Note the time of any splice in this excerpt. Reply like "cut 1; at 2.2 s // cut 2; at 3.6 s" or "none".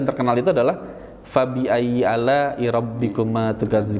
none